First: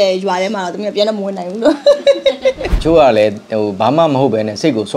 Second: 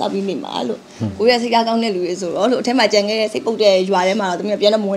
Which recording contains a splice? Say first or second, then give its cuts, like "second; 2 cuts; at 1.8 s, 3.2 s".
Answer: first; 1 cut; at 2.7 s